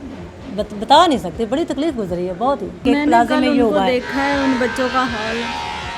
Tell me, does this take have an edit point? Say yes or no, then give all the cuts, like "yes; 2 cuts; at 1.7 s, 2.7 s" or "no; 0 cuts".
yes; 1 cut; at 2.8 s